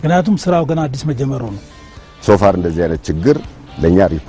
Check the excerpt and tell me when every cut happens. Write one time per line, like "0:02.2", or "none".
0:01.7

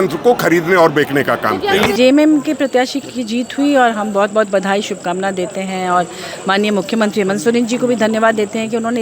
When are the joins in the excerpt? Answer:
0:01.9

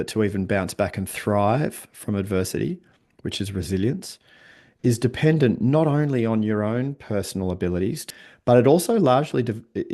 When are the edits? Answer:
0:08.1

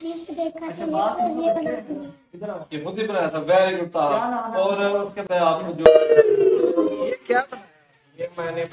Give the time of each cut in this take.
0:05.9

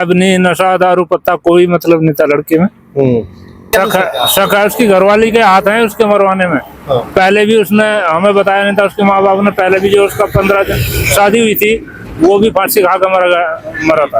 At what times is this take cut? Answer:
0:03.6

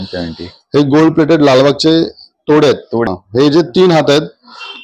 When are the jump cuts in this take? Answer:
0:03.1

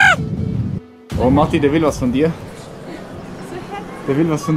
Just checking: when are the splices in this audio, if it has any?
0:00.9

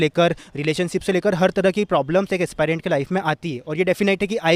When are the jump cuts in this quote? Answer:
none

